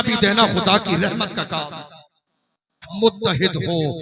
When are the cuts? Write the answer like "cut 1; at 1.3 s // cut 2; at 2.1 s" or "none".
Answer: cut 1; at 2.8 s